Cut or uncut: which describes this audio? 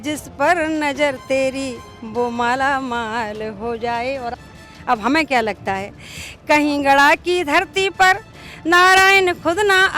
cut